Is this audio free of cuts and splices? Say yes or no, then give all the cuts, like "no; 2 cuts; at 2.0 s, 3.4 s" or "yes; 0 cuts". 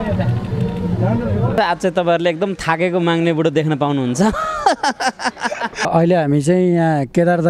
no; 2 cuts; at 1.6 s, 5.9 s